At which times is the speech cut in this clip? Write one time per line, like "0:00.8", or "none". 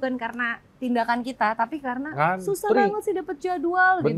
none